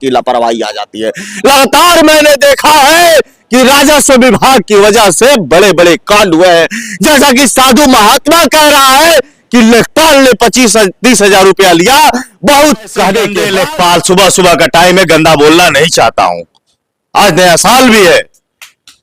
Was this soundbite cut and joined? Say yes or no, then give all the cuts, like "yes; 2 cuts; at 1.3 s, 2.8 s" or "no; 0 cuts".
yes; 1 cut; at 13.4 s